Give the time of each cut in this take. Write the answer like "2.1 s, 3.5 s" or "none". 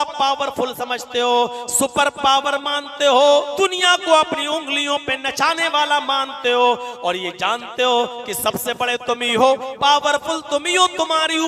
3.5 s